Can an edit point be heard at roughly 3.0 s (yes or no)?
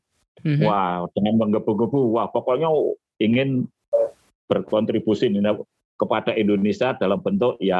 yes